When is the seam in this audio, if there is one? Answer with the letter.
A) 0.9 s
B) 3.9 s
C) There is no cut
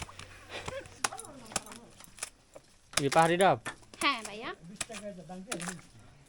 A